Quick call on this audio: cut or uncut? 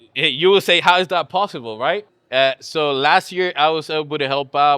cut